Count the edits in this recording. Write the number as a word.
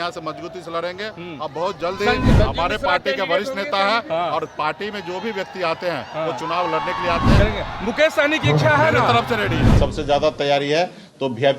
three